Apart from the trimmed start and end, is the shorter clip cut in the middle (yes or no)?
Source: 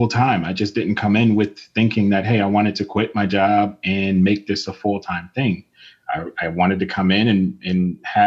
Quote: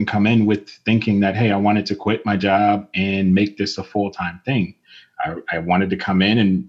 no